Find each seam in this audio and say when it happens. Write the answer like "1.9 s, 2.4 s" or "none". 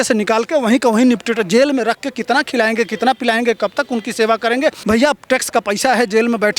4.8 s